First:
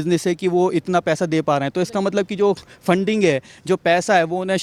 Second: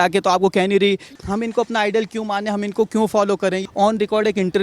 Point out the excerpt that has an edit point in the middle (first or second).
second